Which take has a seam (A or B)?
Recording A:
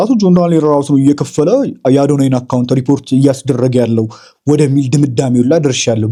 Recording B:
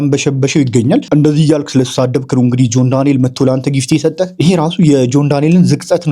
B